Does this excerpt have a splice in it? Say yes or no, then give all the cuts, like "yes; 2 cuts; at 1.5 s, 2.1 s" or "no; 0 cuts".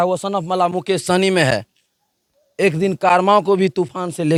no; 0 cuts